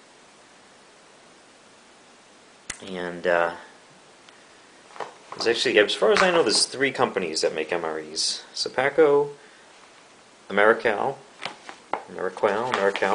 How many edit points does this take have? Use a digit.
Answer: 1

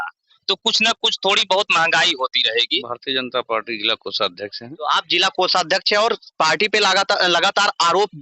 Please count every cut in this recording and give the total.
1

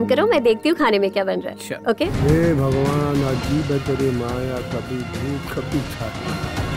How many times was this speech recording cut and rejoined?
1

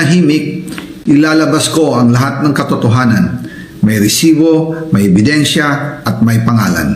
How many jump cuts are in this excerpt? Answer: 0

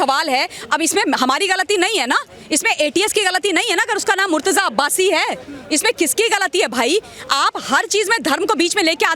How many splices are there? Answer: 0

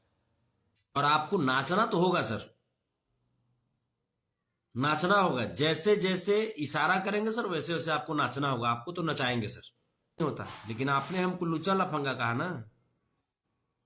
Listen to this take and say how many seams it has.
2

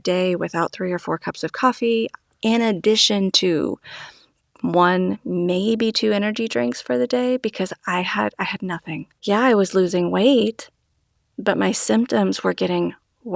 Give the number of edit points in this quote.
1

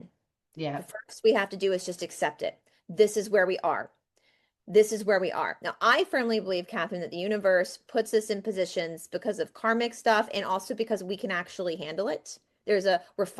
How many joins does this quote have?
0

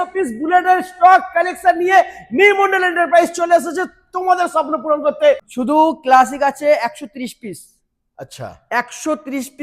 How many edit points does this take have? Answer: 1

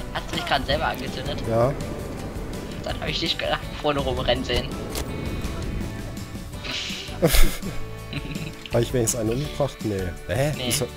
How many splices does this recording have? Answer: 0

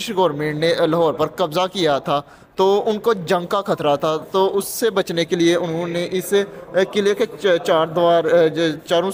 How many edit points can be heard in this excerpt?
0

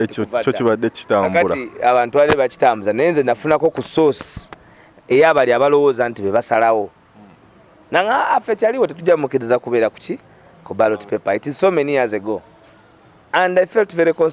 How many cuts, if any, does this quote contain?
0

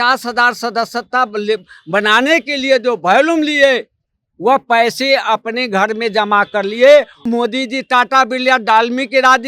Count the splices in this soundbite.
1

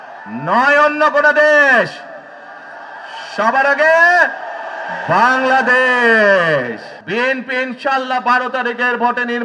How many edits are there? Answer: 1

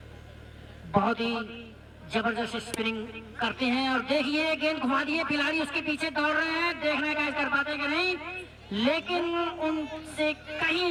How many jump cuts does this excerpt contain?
0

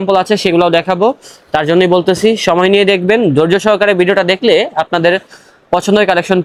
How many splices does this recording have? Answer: 0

